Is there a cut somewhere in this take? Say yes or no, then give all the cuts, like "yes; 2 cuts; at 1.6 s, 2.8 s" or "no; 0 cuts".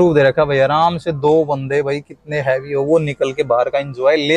no; 0 cuts